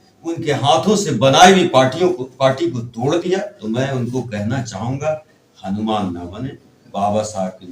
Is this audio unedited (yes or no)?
no